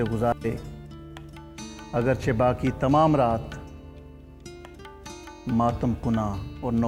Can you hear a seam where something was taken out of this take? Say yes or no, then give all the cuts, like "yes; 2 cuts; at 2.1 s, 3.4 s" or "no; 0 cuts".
no; 0 cuts